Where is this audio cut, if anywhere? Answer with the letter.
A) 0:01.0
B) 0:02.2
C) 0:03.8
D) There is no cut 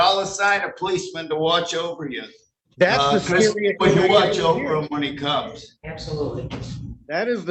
D